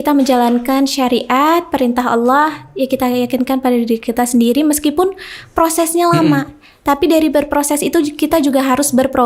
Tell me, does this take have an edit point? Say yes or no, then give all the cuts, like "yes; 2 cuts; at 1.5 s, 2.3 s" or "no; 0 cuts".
no; 0 cuts